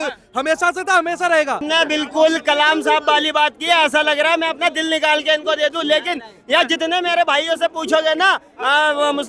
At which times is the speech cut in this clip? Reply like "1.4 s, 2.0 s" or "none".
1.6 s